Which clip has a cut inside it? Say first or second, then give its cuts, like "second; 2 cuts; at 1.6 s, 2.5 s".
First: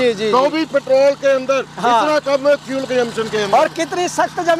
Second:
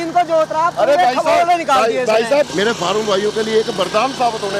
second; 1 cut; at 2.3 s